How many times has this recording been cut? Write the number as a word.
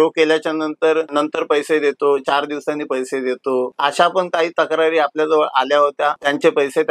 zero